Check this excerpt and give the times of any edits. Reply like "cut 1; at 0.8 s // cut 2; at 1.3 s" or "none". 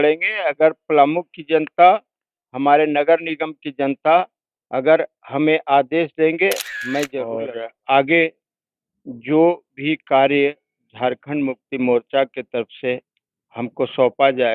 cut 1; at 7.3 s

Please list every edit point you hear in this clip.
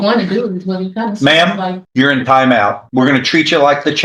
cut 1; at 1.8 s // cut 2; at 2.8 s

